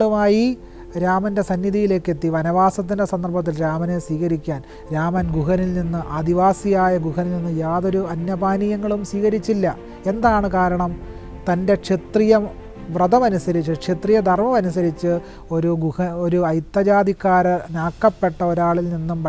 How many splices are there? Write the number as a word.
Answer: zero